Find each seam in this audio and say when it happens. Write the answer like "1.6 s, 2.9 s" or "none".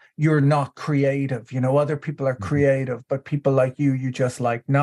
none